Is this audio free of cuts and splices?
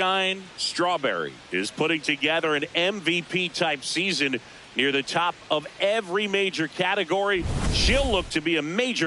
no; 1 cut; at 1.0 s

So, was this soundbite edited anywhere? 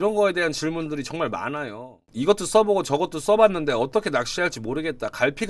yes; 1 cut; at 2.1 s

